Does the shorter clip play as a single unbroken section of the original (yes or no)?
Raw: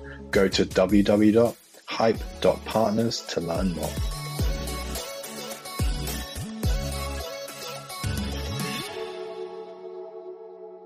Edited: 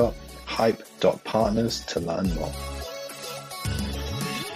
no